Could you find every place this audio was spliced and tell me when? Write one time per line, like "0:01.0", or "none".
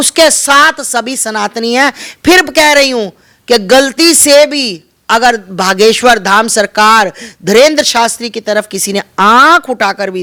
none